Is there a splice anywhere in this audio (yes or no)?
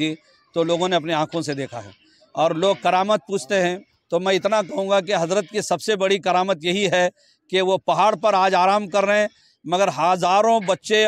yes